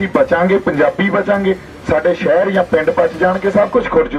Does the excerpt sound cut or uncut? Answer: uncut